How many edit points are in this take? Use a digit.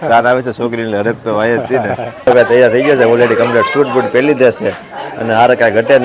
1